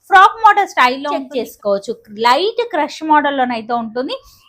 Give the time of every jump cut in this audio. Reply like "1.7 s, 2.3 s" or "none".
1.3 s